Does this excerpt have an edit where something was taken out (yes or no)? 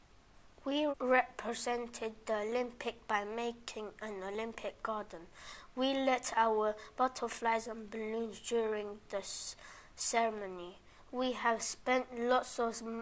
yes